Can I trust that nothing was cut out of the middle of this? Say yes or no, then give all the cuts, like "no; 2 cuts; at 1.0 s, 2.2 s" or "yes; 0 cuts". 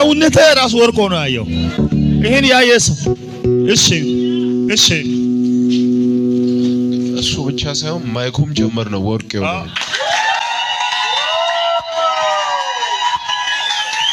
yes; 0 cuts